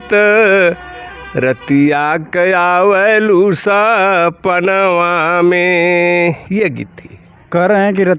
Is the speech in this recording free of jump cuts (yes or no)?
yes